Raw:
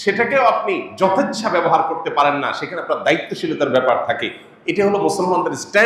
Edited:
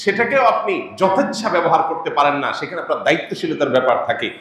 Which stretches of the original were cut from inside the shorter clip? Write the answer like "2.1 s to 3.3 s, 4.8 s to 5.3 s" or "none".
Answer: none